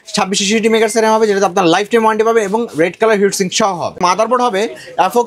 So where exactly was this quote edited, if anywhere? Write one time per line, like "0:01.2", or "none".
0:04.0